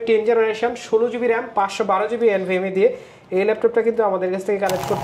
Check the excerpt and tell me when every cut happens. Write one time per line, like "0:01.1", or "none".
none